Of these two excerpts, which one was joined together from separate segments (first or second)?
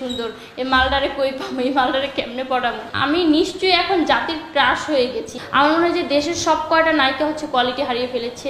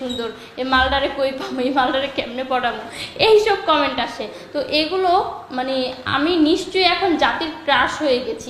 first